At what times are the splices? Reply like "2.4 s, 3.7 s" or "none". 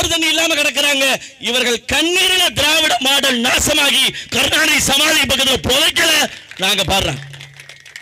none